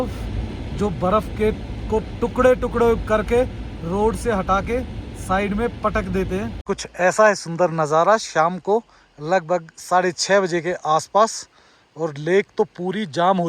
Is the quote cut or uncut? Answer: cut